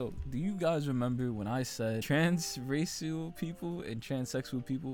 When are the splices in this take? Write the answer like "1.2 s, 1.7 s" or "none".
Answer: 2.0 s